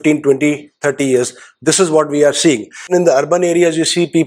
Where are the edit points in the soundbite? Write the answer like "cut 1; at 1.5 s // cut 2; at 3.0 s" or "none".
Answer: cut 1; at 2.9 s